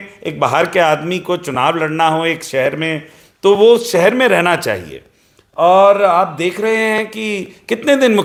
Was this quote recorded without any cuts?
yes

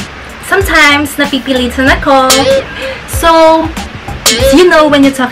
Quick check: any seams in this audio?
yes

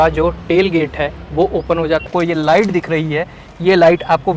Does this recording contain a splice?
yes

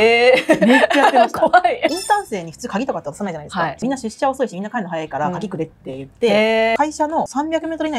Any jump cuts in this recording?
yes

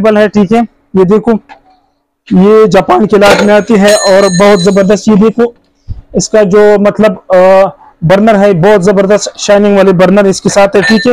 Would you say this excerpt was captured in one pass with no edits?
yes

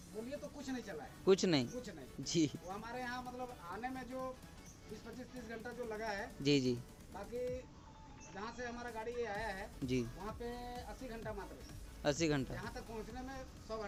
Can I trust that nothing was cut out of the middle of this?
yes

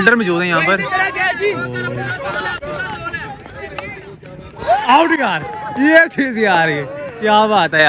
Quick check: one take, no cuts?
yes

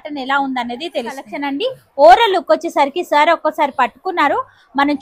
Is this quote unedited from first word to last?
no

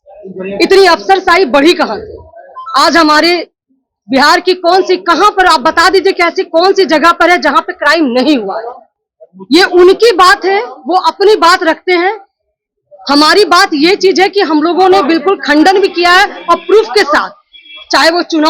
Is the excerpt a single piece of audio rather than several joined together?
yes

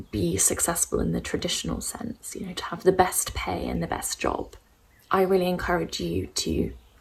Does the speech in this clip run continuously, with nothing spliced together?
yes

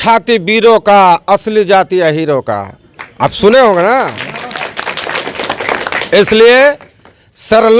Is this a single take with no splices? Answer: yes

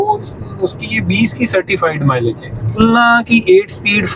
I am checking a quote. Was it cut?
yes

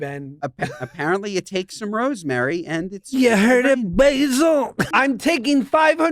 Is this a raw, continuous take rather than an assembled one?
no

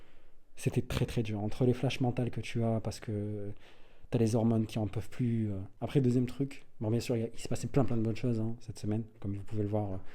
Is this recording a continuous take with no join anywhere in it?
no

